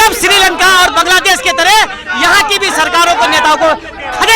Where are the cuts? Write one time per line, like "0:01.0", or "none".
none